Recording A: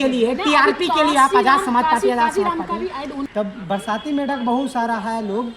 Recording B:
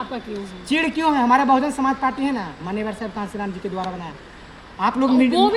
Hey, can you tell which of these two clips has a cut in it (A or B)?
A